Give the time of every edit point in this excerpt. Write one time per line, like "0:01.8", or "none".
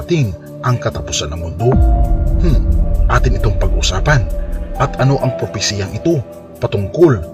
0:02.1

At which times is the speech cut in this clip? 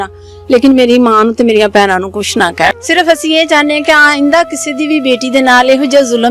0:02.7

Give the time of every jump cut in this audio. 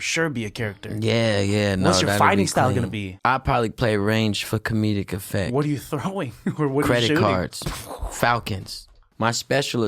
0:03.0
0:09.0

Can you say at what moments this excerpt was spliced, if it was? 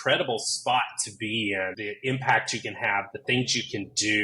0:01.8

